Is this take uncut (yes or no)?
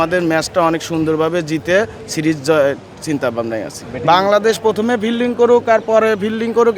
yes